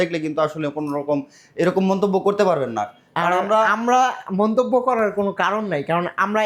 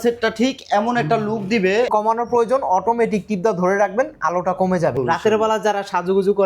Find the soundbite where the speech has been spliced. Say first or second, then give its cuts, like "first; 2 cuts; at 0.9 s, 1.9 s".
second; 2 cuts; at 1.9 s, 5.0 s